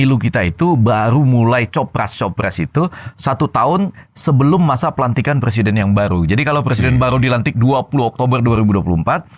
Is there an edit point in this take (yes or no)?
no